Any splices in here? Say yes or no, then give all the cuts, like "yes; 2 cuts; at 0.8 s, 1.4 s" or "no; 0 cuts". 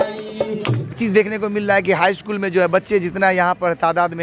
yes; 1 cut; at 0.9 s